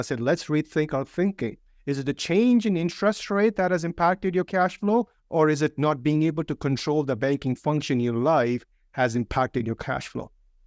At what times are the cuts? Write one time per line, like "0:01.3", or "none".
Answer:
none

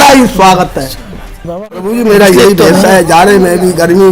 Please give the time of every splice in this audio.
0:01.5

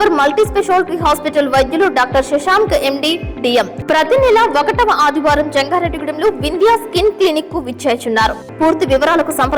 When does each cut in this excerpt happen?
0:03.8
0:08.4

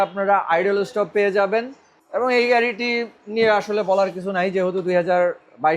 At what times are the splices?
none

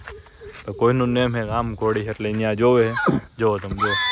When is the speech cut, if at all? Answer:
none

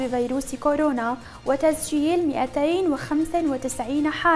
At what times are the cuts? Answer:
none

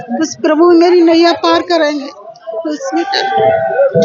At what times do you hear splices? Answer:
none

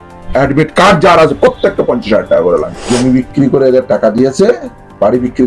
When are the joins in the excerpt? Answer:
0:02.7

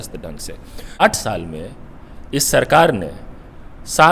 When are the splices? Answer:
0:01.0

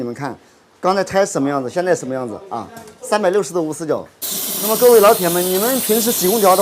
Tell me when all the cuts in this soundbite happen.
0:04.1

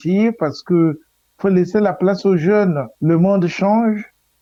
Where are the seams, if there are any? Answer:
none

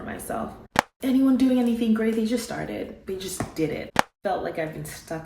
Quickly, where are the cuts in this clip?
0:00.9
0:04.0

